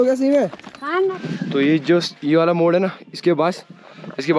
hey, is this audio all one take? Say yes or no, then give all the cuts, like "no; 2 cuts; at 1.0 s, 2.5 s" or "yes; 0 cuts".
no; 1 cut; at 1.1 s